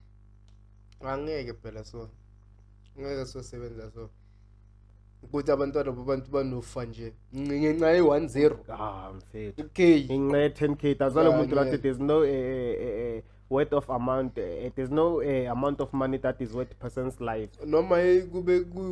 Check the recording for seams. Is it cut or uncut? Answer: uncut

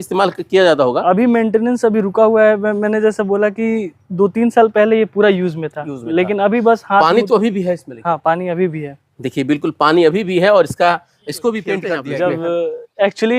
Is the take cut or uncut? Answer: cut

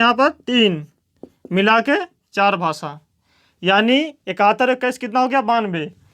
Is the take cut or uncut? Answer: uncut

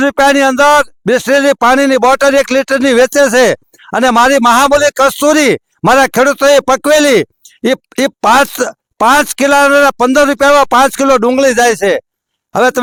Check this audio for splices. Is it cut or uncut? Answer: uncut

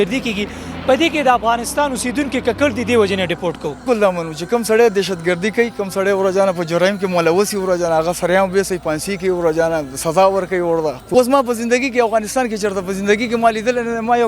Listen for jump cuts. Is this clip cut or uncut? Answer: cut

